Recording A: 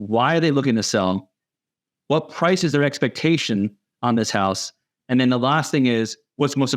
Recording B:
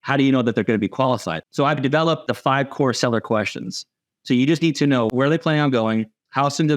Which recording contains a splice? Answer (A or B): B